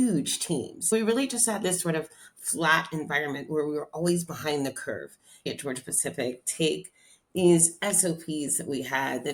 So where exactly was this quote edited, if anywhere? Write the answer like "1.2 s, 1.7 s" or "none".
0.9 s, 5.5 s